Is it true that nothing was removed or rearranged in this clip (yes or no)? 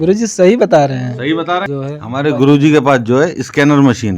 no